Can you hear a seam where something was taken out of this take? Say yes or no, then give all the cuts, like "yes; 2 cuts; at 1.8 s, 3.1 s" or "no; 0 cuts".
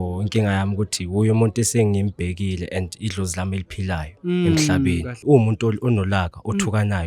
yes; 1 cut; at 5.1 s